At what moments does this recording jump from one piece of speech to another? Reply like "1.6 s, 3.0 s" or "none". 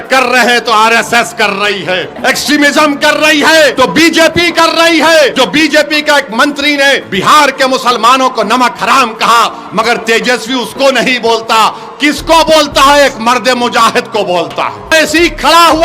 2.1 s, 3.7 s, 5.3 s, 7.1 s, 14.9 s